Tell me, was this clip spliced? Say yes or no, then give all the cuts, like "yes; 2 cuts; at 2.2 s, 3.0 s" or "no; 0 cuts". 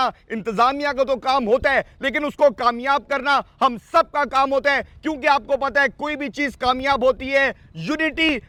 no; 0 cuts